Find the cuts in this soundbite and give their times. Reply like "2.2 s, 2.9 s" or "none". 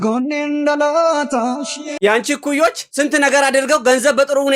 1.9 s